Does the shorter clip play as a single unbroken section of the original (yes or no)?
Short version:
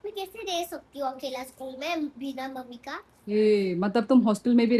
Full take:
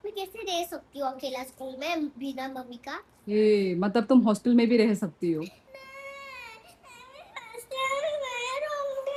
yes